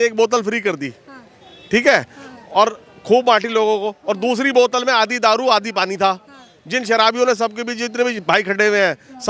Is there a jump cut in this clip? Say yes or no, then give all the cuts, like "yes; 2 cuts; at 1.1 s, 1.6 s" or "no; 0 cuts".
no; 0 cuts